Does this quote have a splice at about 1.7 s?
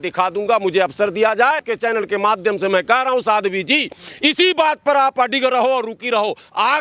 yes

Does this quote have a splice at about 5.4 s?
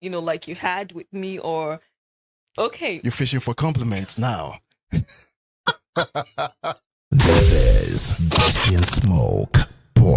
no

